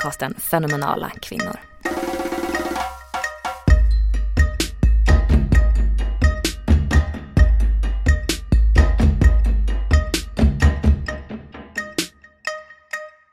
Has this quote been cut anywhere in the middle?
yes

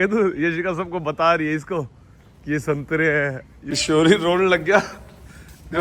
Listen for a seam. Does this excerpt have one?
yes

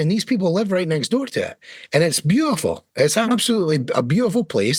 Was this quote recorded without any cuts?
yes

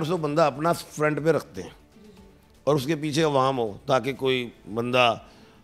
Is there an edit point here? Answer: no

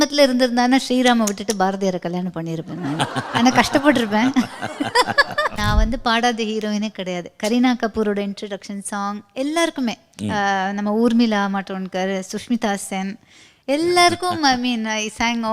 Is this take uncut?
no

